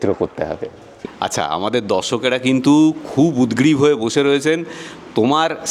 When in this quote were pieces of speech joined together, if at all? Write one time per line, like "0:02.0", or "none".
0:01.0